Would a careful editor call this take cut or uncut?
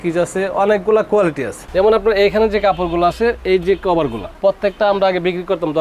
cut